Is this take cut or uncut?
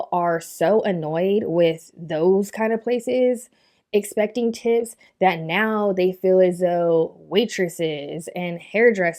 uncut